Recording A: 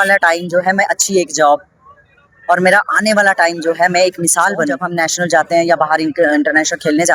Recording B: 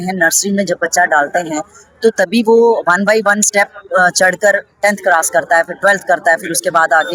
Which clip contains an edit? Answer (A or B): A